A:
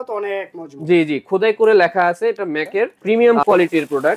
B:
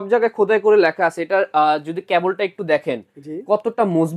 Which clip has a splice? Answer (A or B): A